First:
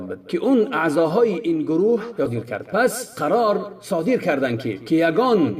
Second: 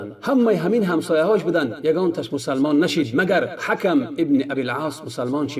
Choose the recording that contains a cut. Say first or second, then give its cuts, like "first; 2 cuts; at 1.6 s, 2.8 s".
first; 1 cut; at 2.3 s